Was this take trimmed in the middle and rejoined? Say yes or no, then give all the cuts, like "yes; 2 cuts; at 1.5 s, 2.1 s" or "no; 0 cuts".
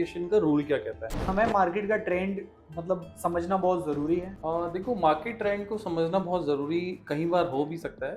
yes; 2 cuts; at 1.3 s, 4.3 s